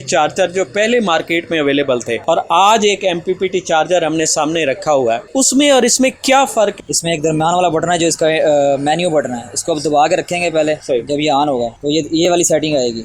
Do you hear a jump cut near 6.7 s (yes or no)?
yes